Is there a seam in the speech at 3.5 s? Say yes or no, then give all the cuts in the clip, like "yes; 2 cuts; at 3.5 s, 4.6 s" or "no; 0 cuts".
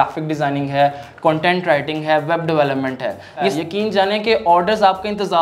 yes; 1 cut; at 3.5 s